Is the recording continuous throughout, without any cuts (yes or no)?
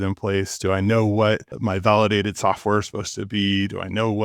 no